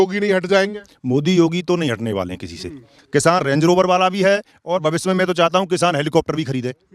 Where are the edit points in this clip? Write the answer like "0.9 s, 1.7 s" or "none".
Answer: 3.0 s